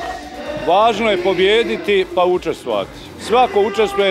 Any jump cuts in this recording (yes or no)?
no